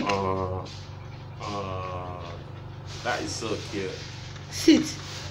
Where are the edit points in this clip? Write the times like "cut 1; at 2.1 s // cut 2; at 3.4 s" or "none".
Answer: none